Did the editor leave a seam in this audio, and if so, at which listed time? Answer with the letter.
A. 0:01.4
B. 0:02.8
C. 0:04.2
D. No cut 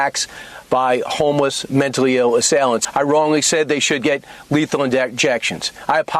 B